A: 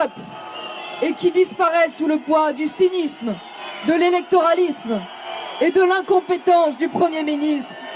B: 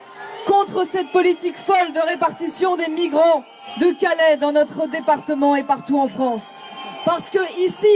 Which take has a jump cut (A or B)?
B